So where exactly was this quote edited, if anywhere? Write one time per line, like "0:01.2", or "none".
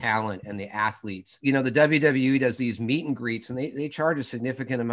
0:01.4